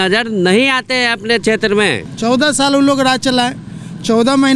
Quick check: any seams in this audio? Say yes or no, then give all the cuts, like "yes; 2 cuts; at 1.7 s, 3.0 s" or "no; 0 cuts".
yes; 1 cut; at 2.1 s